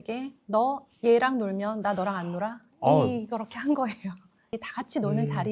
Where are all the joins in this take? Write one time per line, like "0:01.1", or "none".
0:04.6